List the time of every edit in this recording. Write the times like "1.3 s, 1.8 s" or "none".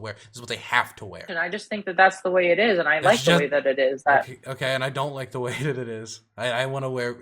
1.3 s